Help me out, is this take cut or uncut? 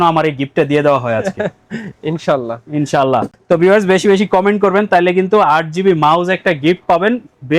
uncut